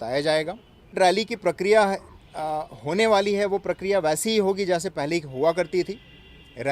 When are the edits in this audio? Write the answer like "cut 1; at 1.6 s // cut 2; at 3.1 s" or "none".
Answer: cut 1; at 0.9 s